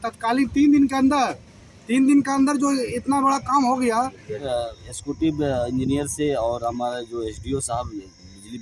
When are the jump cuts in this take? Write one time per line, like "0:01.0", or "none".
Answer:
0:04.4